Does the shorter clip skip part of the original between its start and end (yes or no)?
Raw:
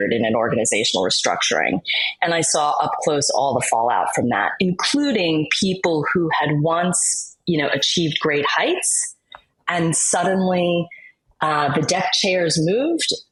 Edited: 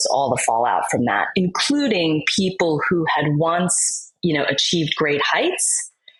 no